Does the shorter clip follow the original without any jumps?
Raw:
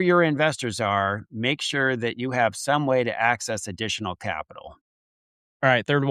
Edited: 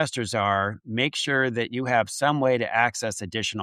yes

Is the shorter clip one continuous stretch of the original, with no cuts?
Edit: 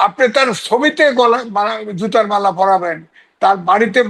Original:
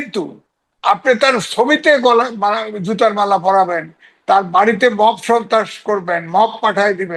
yes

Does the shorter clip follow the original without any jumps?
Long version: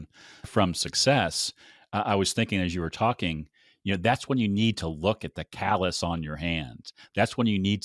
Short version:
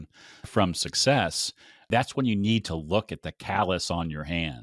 no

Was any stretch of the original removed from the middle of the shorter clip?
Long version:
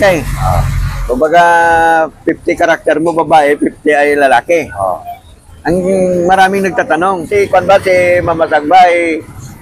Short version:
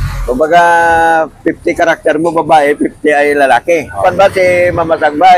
yes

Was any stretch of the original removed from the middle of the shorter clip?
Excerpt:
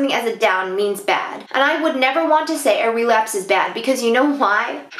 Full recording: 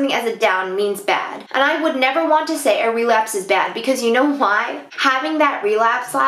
no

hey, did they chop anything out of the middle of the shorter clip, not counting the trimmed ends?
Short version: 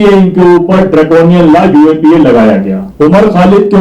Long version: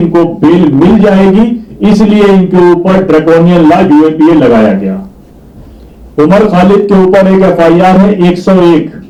yes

